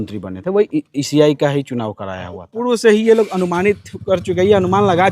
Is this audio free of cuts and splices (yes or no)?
no